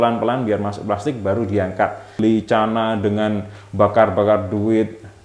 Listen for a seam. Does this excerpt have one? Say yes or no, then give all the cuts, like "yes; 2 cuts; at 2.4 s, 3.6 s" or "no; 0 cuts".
yes; 1 cut; at 2.2 s